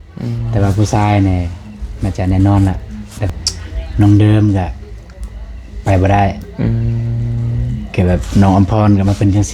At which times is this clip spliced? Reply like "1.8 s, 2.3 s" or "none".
3.3 s

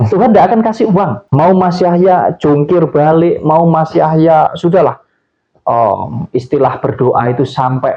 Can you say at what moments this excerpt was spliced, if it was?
1.2 s

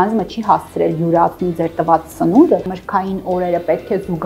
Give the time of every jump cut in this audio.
2.7 s

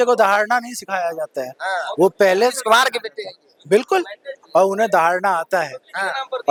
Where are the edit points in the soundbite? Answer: none

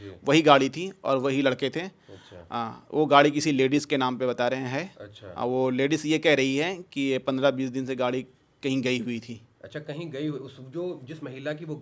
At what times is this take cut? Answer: none

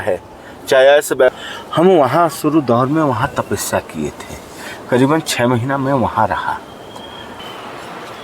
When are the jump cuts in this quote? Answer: 1.3 s, 7.4 s

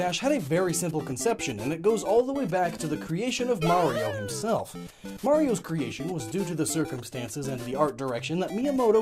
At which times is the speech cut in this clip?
3.7 s

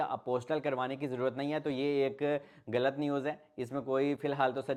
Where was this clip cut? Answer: none

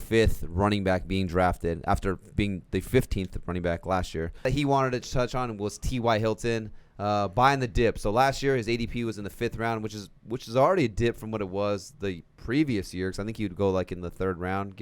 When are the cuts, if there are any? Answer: 4.4 s

